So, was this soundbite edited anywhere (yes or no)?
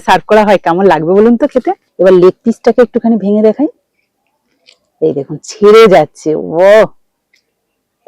yes